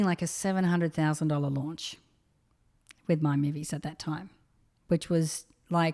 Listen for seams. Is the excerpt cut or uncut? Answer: uncut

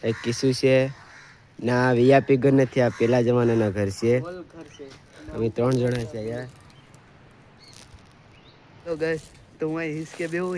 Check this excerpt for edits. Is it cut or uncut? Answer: cut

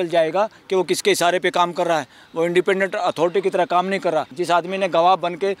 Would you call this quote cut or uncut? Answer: cut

